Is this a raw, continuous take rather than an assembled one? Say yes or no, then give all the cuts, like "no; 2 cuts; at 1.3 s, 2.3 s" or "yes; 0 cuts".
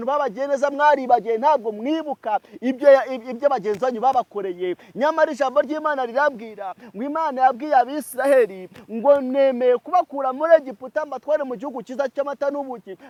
yes; 0 cuts